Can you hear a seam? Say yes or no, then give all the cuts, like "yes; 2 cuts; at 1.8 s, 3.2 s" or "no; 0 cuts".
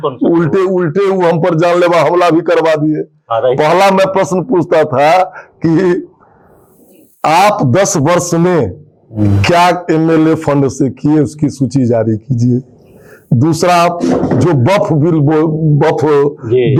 no; 0 cuts